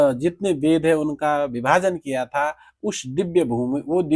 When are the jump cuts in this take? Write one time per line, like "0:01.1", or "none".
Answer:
none